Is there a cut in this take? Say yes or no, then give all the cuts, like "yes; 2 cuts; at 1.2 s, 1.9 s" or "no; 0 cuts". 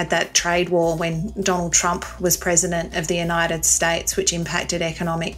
no; 0 cuts